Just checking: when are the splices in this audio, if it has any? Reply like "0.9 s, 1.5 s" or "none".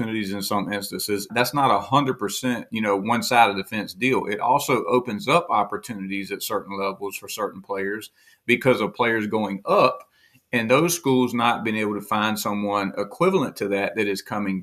1.3 s